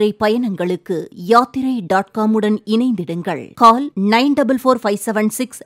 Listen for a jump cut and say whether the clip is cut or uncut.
uncut